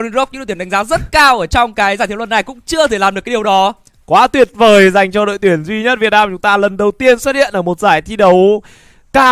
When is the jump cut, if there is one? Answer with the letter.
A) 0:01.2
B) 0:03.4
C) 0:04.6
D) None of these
D